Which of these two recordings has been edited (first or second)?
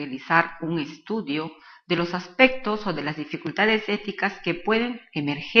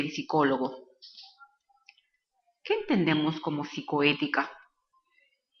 first